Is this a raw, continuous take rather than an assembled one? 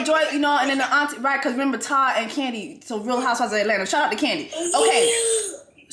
yes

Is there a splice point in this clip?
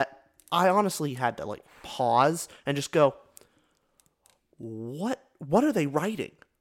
no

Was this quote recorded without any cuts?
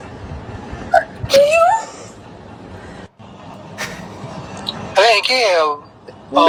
yes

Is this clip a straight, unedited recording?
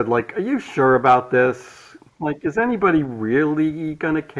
yes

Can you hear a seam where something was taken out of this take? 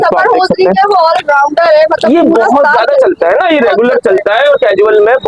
no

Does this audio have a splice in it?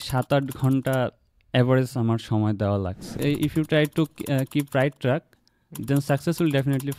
yes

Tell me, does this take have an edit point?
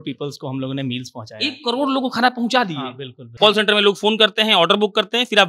yes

